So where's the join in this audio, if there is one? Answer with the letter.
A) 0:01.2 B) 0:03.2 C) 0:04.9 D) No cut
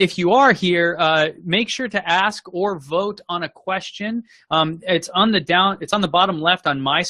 D